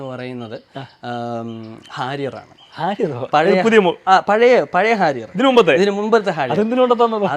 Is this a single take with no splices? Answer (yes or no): yes